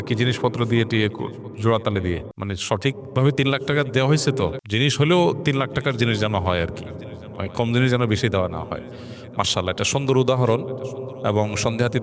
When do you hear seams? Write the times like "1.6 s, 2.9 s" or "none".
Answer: 2.3 s, 4.6 s